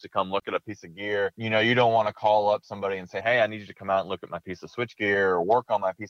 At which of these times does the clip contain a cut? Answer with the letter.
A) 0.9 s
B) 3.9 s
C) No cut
C